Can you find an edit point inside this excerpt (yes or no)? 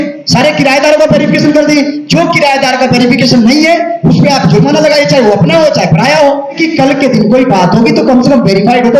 yes